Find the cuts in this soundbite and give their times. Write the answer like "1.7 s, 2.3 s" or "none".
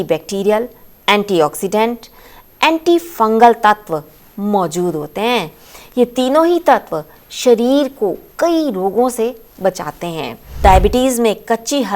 10.6 s

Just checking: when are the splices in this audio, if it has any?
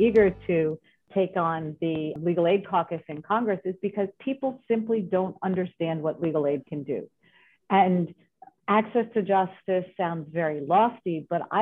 2.2 s

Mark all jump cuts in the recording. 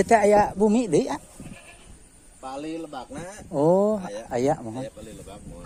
none

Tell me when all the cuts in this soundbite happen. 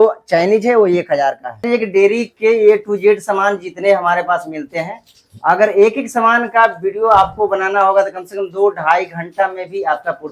1.6 s

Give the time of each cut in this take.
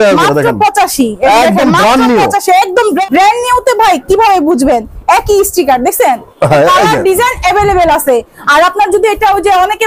3.0 s

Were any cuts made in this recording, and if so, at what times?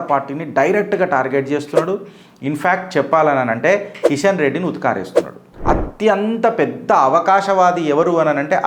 5.5 s

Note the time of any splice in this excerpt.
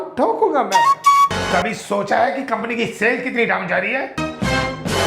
1.3 s, 4.2 s

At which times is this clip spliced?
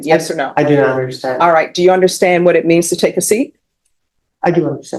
none

